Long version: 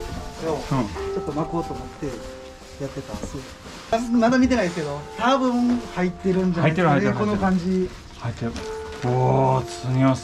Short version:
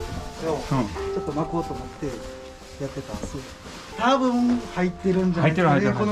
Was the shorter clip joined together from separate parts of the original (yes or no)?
yes